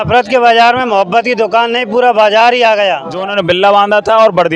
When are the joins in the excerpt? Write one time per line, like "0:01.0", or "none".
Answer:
0:03.2